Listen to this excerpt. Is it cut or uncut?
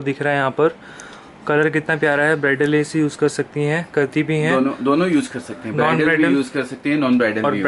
uncut